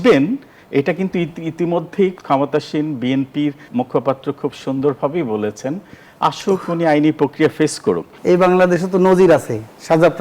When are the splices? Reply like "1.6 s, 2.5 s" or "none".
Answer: 2.2 s, 3.6 s, 8.1 s

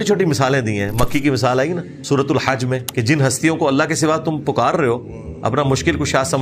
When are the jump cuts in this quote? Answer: 1.9 s, 2.9 s

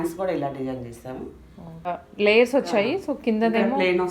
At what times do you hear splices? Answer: 1.9 s

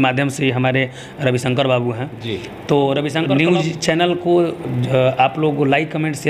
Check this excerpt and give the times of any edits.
3.3 s

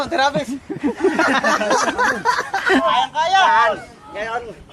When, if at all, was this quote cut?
2.8 s

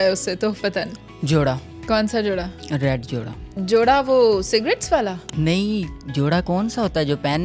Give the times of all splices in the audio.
5.2 s

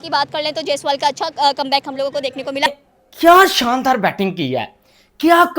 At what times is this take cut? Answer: 2.7 s

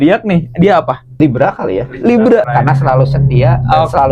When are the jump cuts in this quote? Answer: 1.2 s, 2.5 s

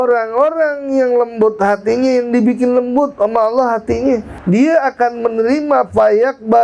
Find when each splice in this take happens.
4.3 s

